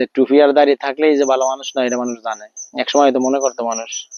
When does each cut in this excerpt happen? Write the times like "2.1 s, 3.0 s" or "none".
none